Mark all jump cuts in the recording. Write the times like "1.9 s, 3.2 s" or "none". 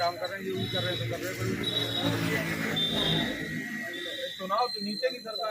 none